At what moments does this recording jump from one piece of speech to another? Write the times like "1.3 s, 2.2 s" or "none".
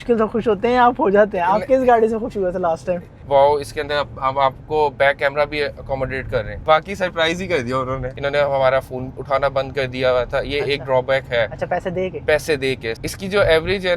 3.1 s, 6.6 s, 8.1 s, 12.9 s